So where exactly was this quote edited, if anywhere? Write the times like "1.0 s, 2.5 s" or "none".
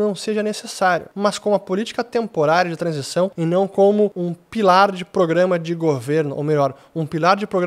1.1 s, 3.4 s, 4.3 s